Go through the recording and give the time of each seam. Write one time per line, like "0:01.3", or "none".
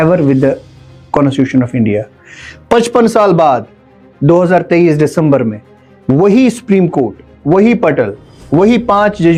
none